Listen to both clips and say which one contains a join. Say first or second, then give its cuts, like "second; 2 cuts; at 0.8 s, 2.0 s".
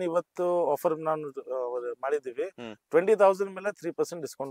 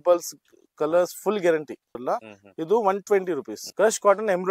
second; 2 cuts; at 2.0 s, 3.6 s